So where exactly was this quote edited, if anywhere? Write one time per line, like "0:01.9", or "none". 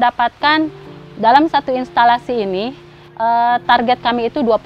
none